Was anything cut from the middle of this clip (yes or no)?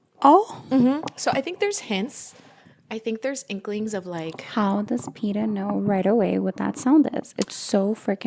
no